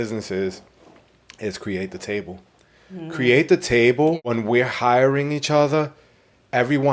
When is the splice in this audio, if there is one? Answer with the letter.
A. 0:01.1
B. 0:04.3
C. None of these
B